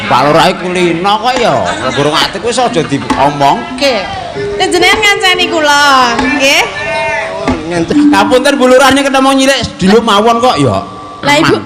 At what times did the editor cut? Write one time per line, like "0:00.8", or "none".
0:07.9